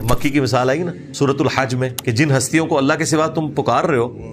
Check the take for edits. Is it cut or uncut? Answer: cut